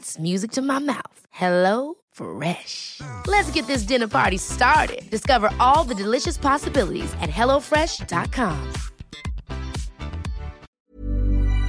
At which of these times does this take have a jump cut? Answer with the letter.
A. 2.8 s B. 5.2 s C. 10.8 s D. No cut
C